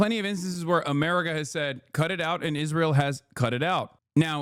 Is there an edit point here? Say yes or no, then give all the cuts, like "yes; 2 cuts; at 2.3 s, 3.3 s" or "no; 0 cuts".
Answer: no; 0 cuts